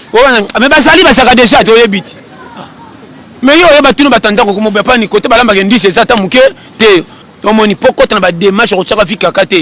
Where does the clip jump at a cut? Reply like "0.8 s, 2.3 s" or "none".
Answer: 7.2 s